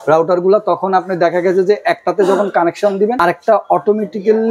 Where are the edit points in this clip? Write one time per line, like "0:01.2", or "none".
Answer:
0:03.2